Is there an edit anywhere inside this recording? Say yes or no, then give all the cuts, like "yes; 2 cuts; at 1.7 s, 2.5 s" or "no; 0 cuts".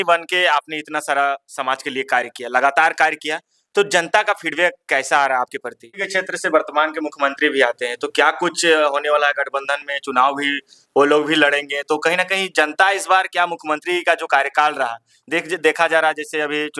yes; 1 cut; at 6.0 s